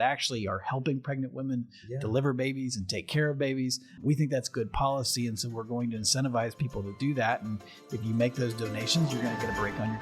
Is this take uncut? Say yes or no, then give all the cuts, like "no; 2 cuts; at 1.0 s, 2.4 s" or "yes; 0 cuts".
no; 1 cut; at 3.9 s